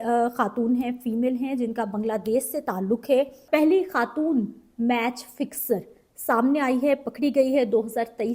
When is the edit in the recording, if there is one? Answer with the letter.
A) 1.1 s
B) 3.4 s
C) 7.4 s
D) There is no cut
B